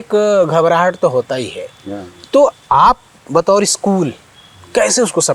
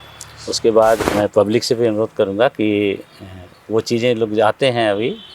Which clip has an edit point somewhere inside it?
second; 1 cut; at 1.0 s

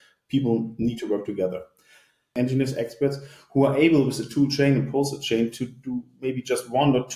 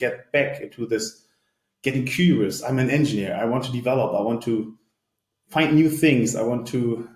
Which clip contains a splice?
first; 1 cut; at 2.3 s

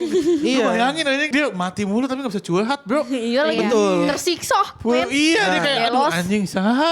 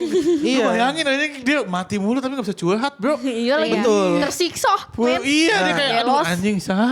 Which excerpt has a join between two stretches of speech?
first; 1 cut; at 1.3 s

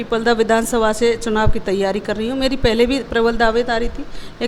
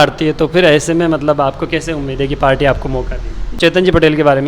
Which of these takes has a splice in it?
second; 1 cut; at 3.6 s

